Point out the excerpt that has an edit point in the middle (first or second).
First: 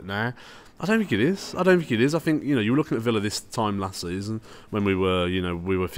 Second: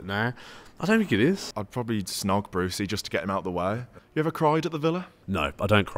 second